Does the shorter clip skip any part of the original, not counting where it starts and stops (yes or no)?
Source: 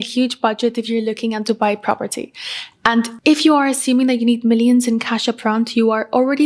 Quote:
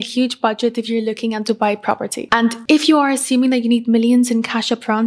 yes